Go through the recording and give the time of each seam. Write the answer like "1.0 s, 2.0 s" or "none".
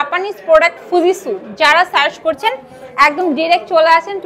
none